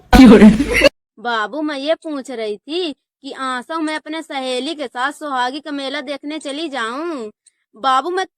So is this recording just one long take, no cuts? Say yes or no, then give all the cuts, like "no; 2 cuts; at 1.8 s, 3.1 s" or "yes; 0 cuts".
no; 1 cut; at 0.9 s